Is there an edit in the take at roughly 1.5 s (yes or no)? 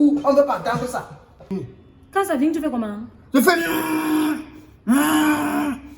yes